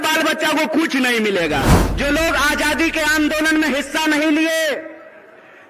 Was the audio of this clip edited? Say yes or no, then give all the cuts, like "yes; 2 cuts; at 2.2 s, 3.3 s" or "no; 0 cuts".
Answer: yes; 1 cut; at 1.8 s